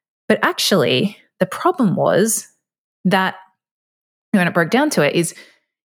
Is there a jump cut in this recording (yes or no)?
no